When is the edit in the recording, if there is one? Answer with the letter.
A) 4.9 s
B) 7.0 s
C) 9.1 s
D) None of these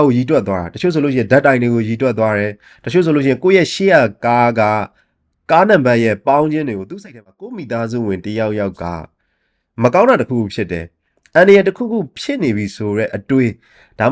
B